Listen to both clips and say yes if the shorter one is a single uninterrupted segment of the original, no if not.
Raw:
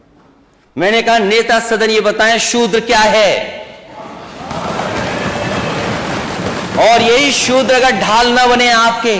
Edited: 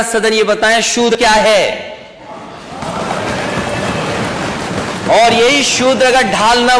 no